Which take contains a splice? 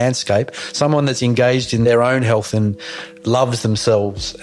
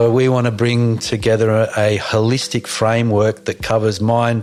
first; 2 cuts; at 1.8 s, 3.1 s

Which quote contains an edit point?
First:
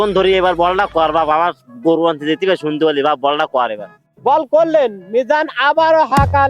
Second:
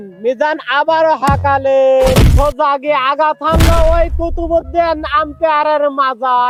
first; 1 cut; at 4.0 s

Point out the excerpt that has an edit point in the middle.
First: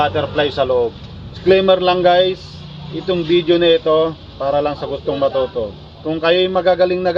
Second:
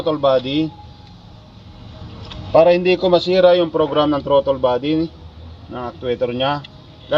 first; 1 cut; at 1.4 s

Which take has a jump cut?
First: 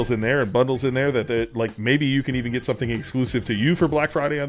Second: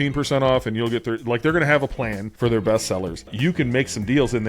second; 2 cuts; at 2.2 s, 3.3 s

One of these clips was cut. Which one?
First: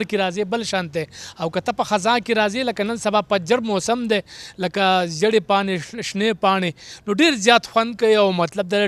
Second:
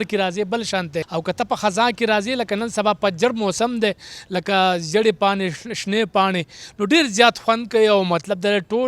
second; 1 cut; at 1.1 s

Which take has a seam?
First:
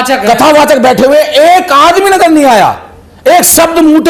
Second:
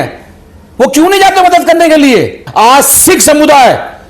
second; 1 cut; at 2.4 s

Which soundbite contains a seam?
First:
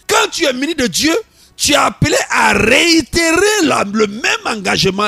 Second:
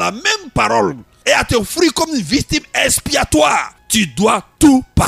second; 2 cuts; at 1.1 s, 3.8 s

